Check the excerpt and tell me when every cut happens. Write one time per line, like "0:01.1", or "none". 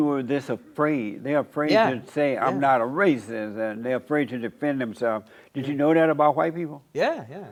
none